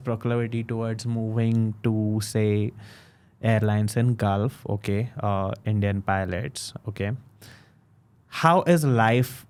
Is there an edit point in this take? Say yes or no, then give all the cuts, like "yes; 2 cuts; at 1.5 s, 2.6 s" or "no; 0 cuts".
no; 0 cuts